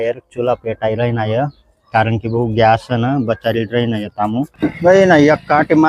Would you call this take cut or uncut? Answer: cut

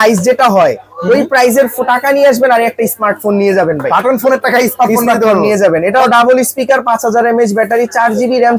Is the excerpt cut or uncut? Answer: uncut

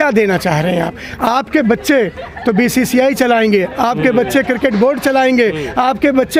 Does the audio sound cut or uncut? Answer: uncut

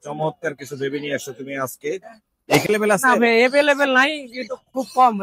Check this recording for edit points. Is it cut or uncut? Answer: cut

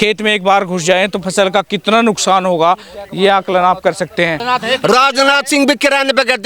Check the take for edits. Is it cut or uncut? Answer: cut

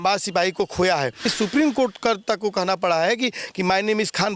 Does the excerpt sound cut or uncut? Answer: cut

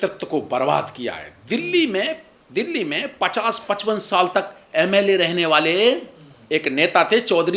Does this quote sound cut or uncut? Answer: uncut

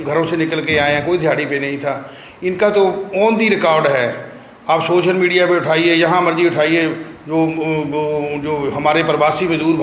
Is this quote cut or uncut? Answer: uncut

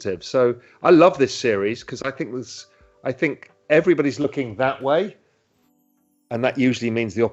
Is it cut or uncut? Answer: uncut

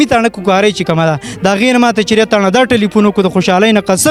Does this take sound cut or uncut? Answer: uncut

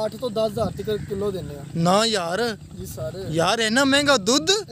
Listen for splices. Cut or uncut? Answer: uncut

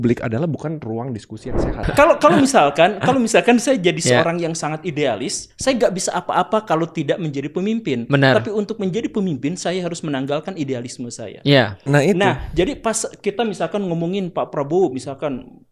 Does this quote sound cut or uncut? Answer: cut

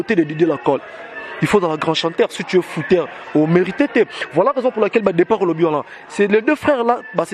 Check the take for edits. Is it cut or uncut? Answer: uncut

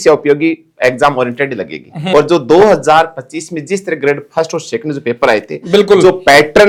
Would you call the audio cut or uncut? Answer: uncut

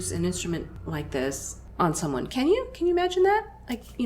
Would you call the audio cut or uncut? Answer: cut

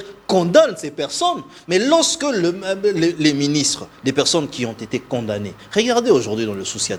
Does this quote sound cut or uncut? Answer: uncut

